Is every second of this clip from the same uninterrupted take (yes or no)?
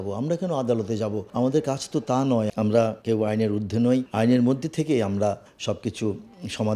no